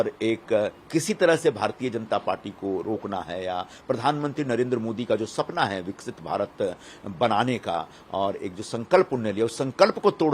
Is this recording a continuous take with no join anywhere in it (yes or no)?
yes